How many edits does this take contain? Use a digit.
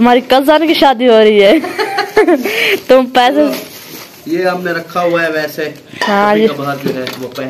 0